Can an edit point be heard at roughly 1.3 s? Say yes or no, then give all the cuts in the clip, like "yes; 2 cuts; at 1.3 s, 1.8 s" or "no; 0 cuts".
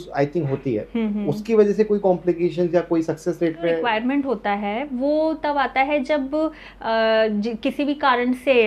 no; 1 cut; at 3.8 s